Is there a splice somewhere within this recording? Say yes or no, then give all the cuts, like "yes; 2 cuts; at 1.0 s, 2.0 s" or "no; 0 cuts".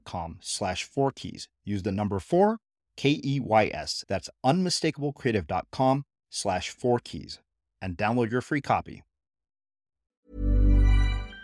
yes; 1 cut; at 10.2 s